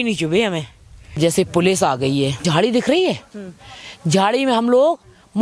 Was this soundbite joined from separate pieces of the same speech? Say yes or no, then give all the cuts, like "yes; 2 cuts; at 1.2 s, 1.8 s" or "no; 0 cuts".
yes; 2 cuts; at 1.2 s, 2.4 s